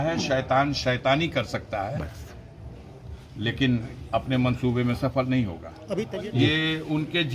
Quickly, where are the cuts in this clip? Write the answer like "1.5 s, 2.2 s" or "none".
5.7 s

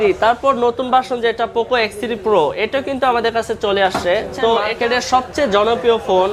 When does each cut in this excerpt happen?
4.7 s

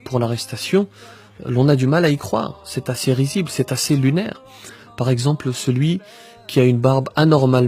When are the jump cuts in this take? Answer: none

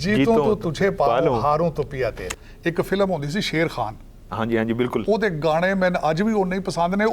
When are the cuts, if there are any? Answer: 2.2 s

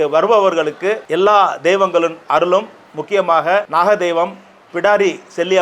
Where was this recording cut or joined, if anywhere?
1.0 s, 3.7 s

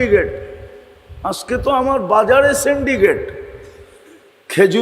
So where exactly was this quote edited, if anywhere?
1.7 s

